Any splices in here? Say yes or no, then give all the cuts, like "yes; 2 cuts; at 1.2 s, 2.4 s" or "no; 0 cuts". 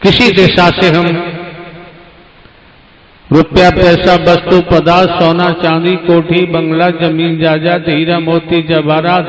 no; 0 cuts